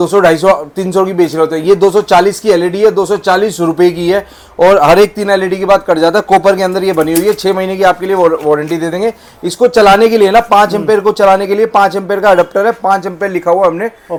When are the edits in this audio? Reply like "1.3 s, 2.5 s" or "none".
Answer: none